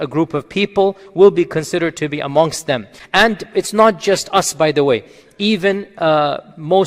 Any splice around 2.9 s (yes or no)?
yes